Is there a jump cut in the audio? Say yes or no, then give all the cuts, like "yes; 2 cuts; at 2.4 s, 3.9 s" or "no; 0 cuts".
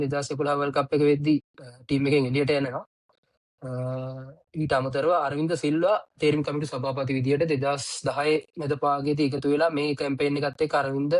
no; 0 cuts